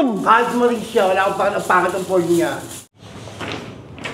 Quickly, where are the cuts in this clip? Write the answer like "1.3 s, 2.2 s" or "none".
2.7 s